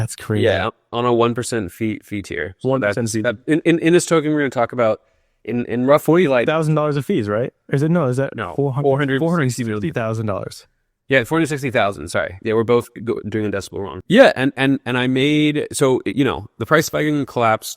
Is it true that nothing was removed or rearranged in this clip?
no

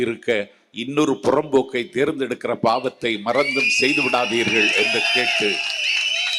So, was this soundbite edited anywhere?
no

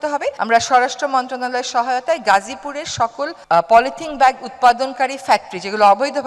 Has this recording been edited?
no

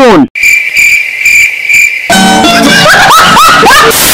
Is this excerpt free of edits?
yes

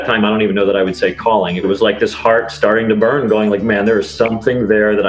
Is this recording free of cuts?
no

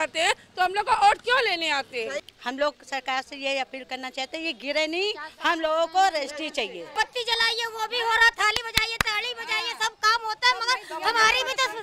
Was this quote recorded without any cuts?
no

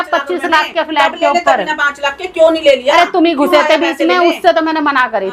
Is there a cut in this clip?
no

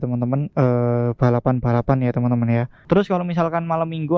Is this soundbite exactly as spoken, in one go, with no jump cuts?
no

